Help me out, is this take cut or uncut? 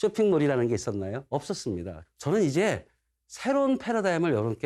cut